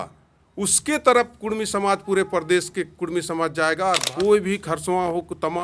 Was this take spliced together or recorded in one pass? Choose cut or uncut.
cut